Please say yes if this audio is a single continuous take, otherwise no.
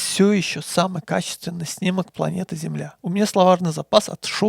no